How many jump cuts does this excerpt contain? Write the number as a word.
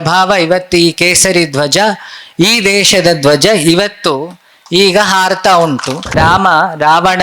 one